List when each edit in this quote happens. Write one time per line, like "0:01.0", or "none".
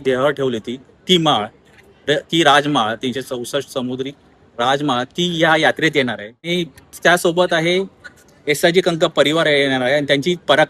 0:06.5